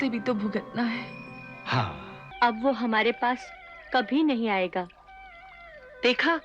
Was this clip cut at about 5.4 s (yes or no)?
no